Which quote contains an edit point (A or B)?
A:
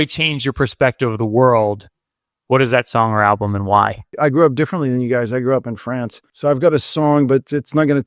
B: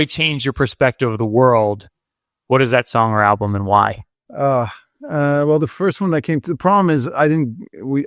A